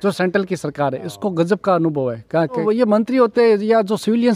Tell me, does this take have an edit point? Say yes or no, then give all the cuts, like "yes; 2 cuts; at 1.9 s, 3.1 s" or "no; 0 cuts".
yes; 1 cut; at 2.6 s